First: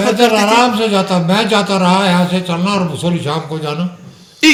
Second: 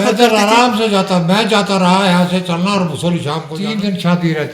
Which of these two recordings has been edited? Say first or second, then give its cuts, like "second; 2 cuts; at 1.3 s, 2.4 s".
second; 1 cut; at 3.5 s